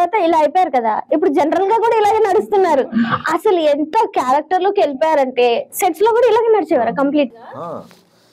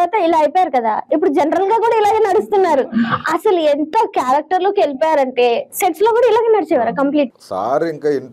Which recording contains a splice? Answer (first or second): second